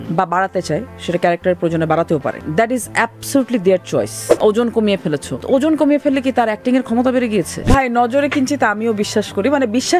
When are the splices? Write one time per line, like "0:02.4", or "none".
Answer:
0:02.4
0:04.2
0:05.3
0:07.7

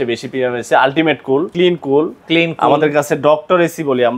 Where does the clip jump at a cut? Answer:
0:01.5

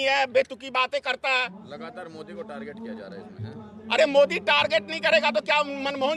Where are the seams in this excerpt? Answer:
none

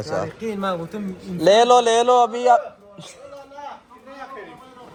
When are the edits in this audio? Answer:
none

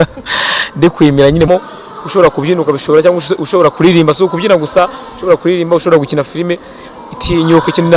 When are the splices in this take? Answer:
0:01.5

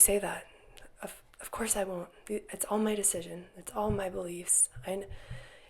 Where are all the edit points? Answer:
none

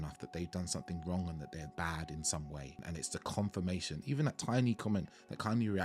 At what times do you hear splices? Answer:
0:01.7
0:02.8

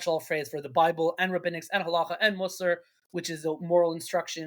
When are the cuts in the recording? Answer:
none

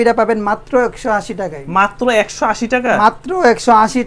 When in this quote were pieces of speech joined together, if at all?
none

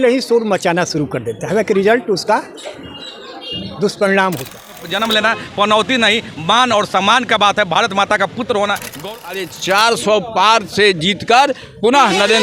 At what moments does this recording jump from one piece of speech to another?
0:04.9
0:09.0

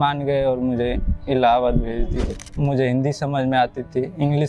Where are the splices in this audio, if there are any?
0:02.4

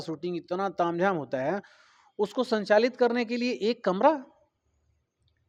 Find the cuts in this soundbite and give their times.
none

